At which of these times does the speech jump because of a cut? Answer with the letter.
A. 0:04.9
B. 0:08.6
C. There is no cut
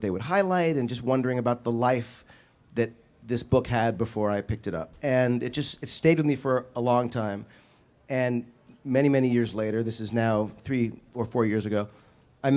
B